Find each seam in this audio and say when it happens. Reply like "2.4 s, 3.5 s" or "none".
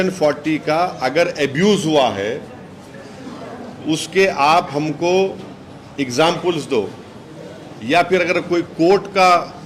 none